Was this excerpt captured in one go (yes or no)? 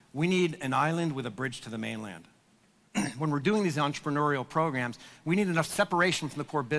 yes